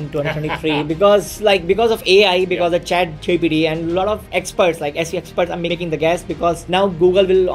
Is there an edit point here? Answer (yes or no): yes